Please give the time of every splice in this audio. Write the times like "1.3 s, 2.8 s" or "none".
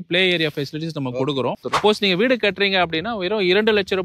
1.6 s